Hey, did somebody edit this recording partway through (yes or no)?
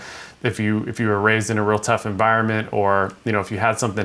no